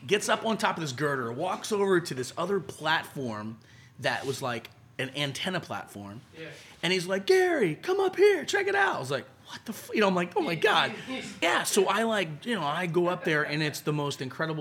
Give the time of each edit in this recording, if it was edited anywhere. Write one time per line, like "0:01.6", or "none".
0:11.4